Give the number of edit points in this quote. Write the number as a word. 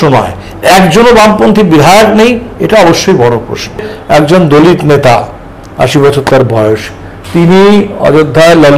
one